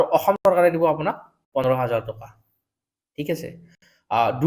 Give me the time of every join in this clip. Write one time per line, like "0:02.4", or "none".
none